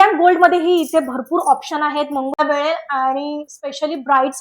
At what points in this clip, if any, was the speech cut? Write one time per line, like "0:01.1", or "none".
0:02.4